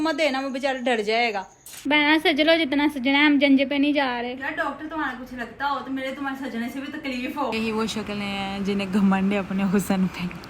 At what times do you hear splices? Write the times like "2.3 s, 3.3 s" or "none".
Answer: 1.8 s, 7.5 s